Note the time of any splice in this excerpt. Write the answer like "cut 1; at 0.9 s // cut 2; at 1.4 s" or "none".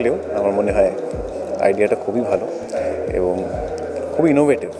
none